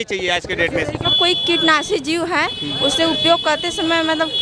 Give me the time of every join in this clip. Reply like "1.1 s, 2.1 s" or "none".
1.1 s